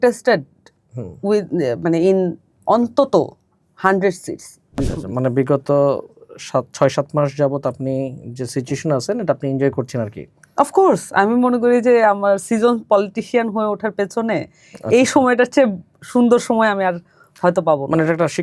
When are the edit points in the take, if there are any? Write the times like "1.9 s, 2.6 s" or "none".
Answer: 4.8 s